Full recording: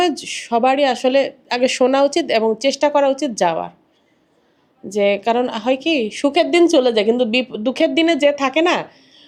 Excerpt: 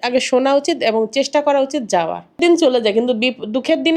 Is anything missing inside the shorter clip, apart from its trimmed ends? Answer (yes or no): yes